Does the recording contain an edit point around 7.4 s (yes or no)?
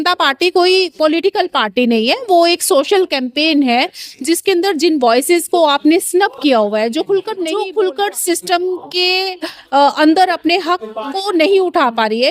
yes